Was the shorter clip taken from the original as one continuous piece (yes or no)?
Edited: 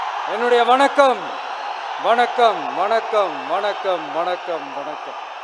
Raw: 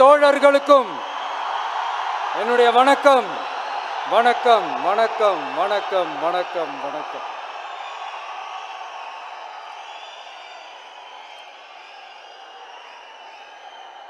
yes